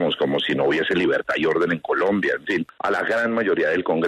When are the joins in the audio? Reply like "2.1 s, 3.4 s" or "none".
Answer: 2.7 s